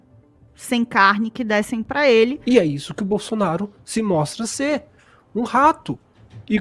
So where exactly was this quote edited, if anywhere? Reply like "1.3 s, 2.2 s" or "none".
2.4 s